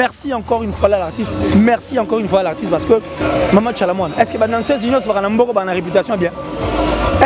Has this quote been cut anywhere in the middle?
yes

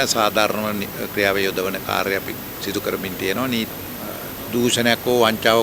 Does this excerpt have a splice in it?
yes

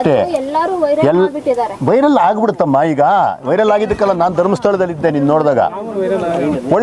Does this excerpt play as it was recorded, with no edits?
yes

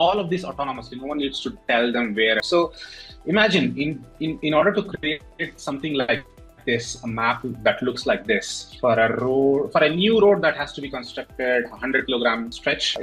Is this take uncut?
no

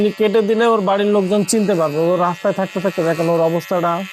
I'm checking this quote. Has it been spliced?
no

